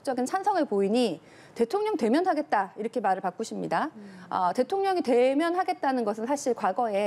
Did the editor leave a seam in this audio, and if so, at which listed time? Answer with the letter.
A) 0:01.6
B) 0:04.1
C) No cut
C